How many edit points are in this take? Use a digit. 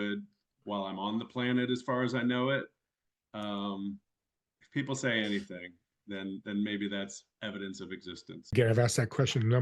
1